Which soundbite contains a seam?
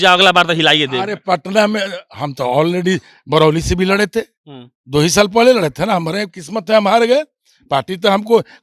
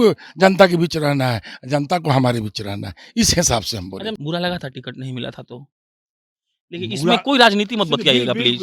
second; 1 cut; at 4.2 s

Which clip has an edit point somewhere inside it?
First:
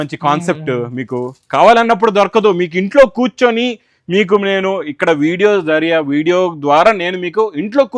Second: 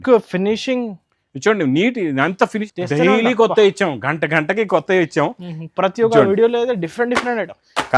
second; 1 cut; at 2.6 s

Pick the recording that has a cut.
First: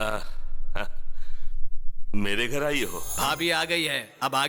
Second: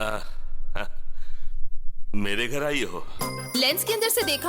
first; 1 cut; at 3.0 s

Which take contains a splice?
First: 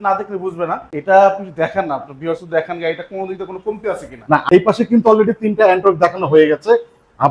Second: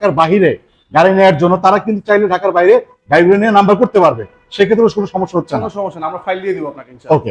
first; 2 cuts; at 0.9 s, 4.4 s

